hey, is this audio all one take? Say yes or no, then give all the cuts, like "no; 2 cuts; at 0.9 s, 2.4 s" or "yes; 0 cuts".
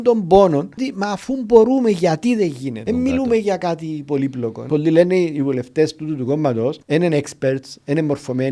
no; 4 cuts; at 0.9 s, 2.8 s, 4.6 s, 6.8 s